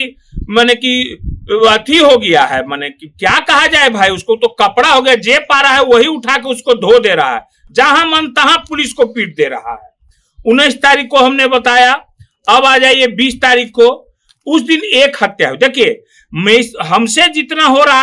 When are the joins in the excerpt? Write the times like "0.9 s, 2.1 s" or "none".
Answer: none